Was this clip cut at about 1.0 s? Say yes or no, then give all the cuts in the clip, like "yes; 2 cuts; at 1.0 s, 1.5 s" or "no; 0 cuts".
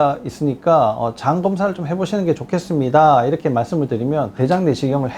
no; 0 cuts